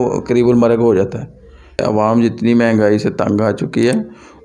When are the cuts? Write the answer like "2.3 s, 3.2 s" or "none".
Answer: 1.8 s